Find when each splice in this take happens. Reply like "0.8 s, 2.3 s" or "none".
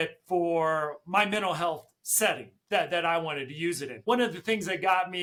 none